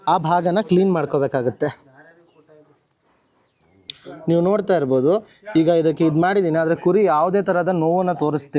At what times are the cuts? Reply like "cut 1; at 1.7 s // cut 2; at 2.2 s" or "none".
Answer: cut 1; at 3.9 s